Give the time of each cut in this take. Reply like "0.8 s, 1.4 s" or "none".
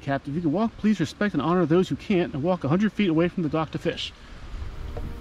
none